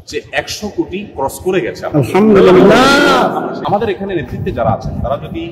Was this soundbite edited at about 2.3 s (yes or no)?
no